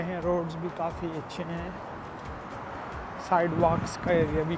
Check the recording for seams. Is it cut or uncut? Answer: uncut